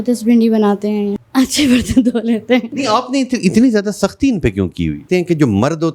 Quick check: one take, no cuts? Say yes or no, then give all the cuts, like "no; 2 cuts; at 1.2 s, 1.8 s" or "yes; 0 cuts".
no; 3 cuts; at 1.2 s, 2.7 s, 5.0 s